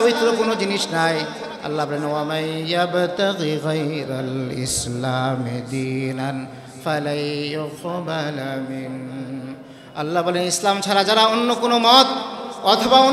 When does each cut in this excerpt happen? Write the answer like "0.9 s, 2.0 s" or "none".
none